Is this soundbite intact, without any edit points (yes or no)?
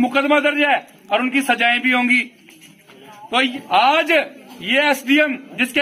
no